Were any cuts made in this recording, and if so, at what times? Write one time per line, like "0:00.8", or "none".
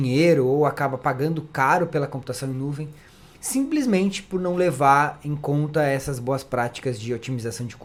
none